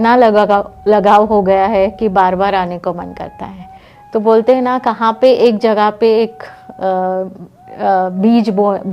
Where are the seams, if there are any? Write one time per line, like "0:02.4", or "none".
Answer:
none